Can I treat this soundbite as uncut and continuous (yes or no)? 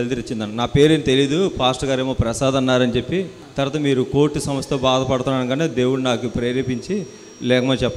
no